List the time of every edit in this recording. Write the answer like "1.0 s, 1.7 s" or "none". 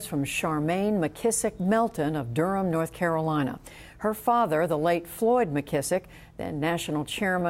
none